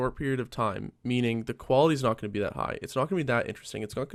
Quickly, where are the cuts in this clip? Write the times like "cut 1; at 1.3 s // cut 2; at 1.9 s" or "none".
none